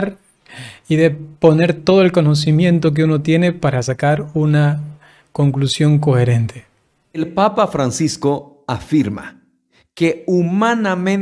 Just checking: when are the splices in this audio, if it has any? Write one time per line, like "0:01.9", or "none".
0:07.2

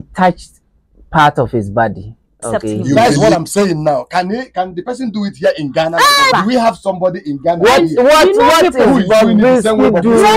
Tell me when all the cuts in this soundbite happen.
0:03.0
0:06.3

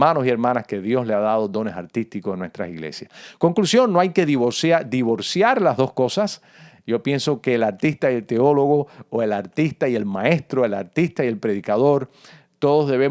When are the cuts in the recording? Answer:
none

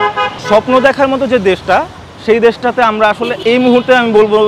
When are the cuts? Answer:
0:03.3

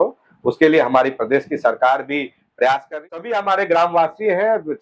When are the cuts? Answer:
0:02.9

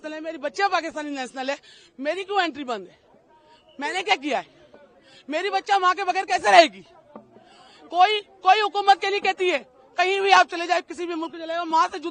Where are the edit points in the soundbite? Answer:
none

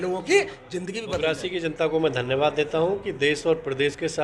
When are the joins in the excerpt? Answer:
0:01.0

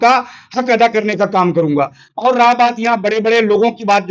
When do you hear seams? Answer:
0:02.1

